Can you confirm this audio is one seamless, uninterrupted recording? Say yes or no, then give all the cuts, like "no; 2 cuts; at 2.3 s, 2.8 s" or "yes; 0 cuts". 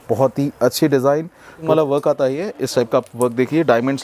no; 1 cut; at 1.6 s